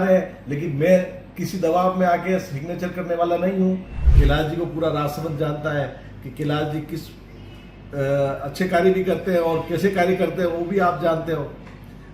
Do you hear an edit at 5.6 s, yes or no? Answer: no